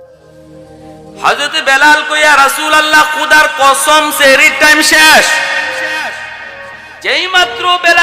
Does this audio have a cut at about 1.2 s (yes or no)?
yes